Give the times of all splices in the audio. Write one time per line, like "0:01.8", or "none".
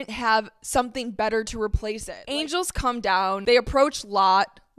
0:02.1
0:03.4